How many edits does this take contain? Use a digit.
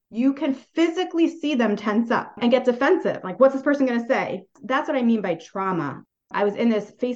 2